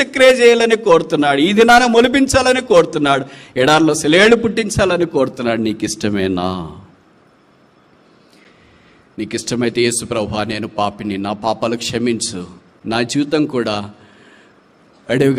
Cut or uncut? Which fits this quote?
uncut